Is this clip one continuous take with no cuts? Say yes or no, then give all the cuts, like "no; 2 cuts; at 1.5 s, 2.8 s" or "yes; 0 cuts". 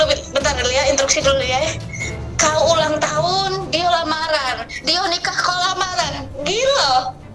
yes; 0 cuts